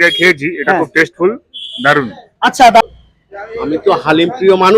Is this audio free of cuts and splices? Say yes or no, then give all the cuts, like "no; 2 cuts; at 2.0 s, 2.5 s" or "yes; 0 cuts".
no; 1 cut; at 2.8 s